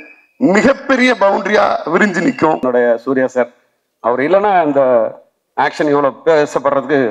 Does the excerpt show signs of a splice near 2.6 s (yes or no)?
yes